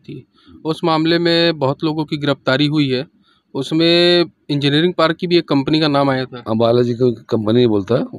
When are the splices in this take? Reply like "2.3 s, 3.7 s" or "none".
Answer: none